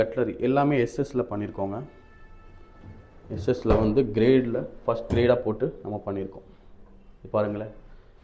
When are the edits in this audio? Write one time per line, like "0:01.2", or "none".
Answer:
none

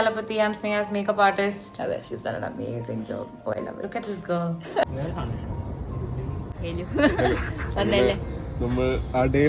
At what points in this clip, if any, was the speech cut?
0:04.8

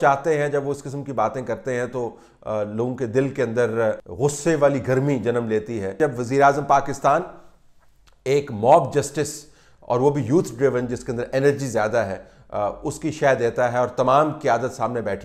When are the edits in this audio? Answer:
0:04.1
0:06.0

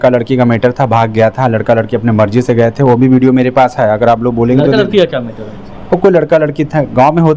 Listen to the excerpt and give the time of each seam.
none

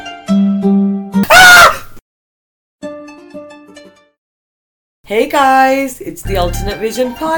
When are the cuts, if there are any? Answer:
0:01.2

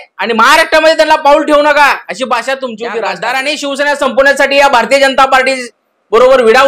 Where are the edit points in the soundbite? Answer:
0:03.0

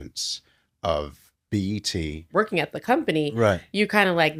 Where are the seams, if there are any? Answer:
0:02.3

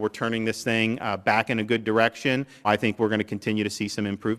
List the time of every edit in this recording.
0:02.7

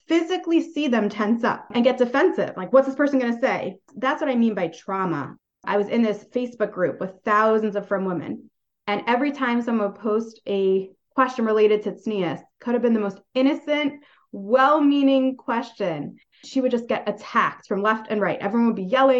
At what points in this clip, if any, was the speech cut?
0:01.7
0:05.6

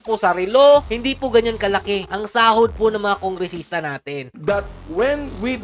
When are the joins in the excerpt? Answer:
0:00.9
0:04.3

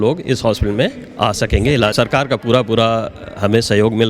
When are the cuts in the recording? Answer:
0:01.9

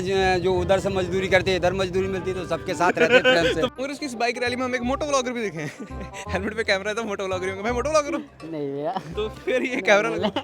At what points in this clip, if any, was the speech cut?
0:03.7

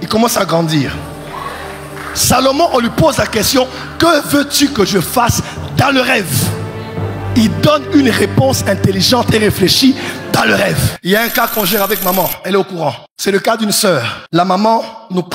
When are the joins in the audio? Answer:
0:10.9
0:13.1
0:14.2

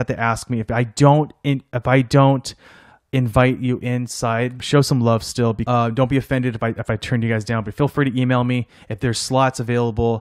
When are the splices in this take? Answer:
0:04.6
0:05.6

